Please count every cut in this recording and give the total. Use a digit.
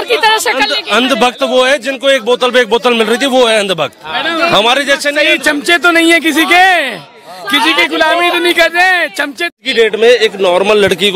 1